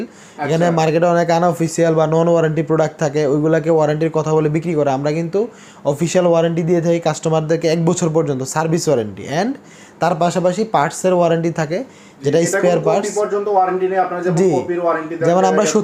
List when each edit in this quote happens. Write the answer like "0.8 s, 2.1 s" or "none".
none